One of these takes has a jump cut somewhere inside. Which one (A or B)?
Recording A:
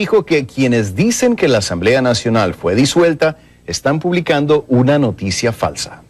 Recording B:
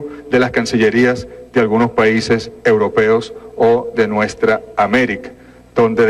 A